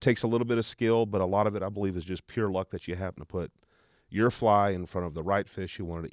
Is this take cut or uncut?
uncut